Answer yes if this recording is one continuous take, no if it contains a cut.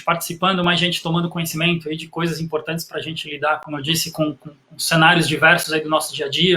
yes